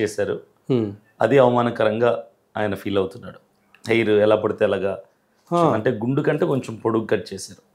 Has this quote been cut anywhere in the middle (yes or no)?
no